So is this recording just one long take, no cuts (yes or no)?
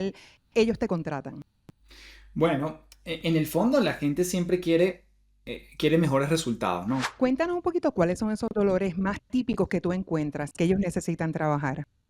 no